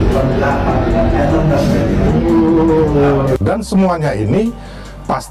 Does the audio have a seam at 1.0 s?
no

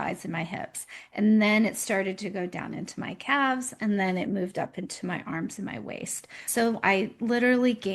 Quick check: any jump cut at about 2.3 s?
no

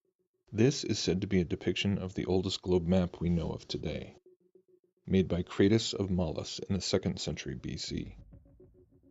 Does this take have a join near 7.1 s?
no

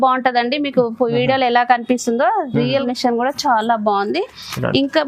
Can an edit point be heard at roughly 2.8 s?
yes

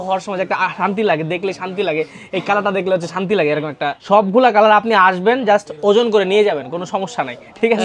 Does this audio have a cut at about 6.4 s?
no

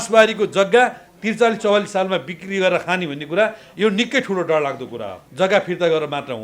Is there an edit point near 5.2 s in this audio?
yes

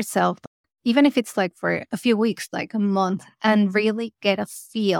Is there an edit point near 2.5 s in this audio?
yes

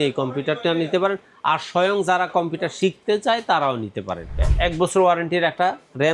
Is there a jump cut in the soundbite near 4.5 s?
yes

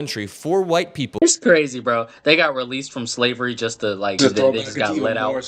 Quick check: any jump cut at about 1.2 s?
yes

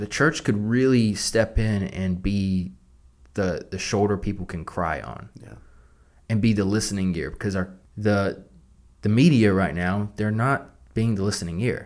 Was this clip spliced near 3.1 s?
no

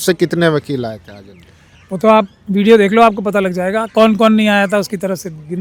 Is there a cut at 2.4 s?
no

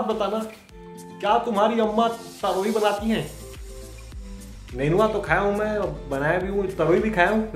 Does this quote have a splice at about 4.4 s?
no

